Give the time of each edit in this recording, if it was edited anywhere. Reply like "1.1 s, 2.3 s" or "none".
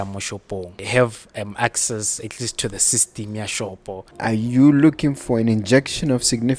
0.8 s, 4.1 s